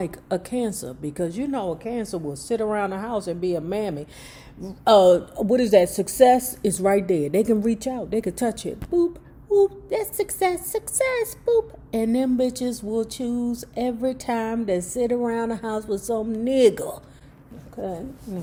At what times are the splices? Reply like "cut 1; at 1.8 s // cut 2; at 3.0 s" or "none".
none

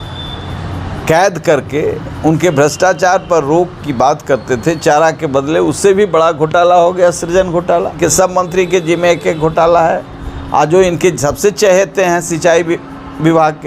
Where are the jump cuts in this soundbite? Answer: cut 1; at 7.9 s

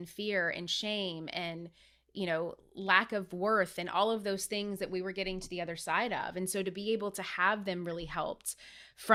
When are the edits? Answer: none

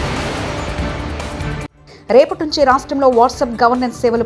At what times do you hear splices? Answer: none

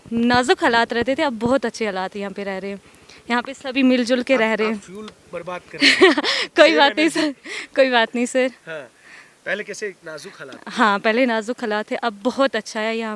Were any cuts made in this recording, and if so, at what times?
none

